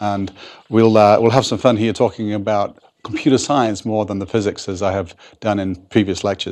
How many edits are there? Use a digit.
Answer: 0